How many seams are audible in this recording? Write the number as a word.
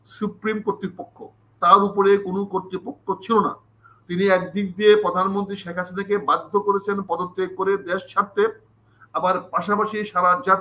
zero